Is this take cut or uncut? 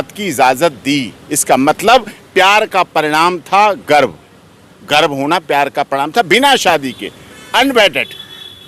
uncut